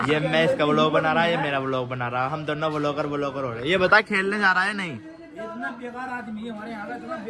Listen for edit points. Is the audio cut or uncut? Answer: uncut